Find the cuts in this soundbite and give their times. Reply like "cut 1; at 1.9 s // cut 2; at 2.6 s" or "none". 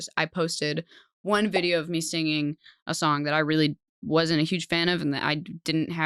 none